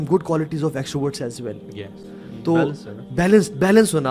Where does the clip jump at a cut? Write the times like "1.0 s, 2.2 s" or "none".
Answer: none